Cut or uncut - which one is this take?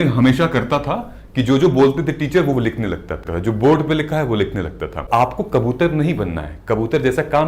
cut